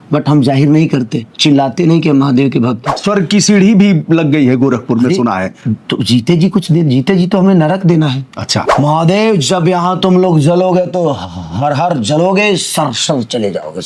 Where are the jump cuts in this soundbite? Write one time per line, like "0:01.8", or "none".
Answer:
0:03.0
0:08.6